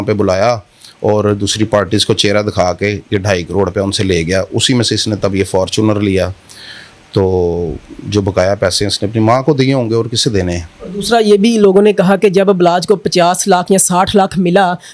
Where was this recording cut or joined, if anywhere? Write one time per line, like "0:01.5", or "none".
none